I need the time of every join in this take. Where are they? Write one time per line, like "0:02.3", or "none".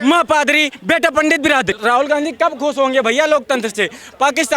0:01.7